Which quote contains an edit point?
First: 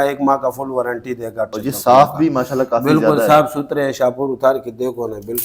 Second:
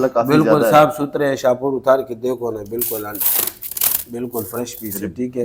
first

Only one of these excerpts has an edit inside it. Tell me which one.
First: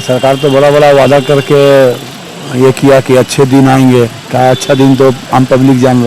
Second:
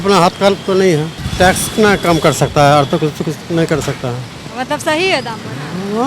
second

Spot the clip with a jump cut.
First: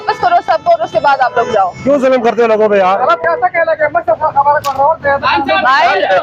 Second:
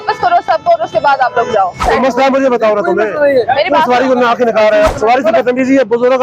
second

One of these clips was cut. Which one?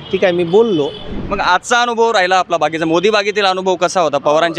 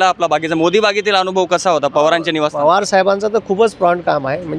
first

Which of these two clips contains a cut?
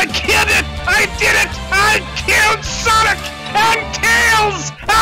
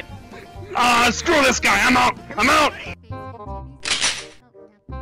second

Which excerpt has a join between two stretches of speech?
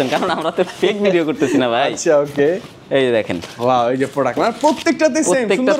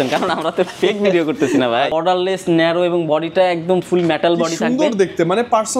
second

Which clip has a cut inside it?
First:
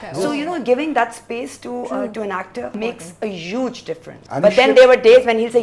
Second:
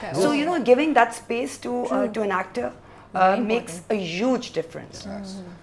first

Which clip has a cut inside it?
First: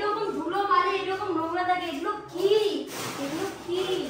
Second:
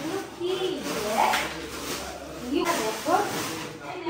second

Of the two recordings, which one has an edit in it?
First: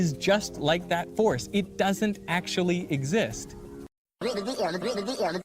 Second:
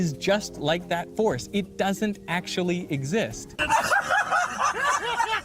first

